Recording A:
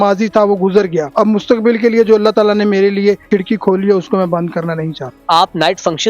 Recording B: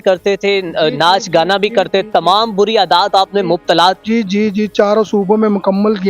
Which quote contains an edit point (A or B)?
A